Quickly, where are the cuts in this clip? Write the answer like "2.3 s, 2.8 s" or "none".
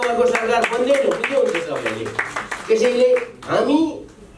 none